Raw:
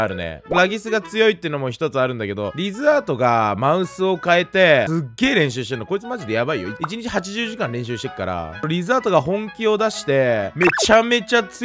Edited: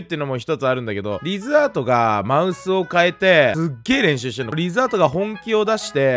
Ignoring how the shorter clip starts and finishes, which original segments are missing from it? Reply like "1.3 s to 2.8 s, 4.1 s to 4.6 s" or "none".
5.8 s to 8.6 s